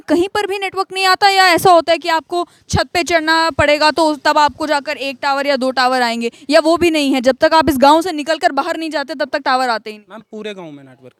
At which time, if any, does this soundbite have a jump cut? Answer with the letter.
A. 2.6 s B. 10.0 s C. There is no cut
C